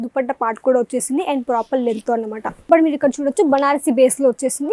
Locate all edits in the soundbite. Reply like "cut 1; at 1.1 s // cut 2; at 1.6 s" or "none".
cut 1; at 2.7 s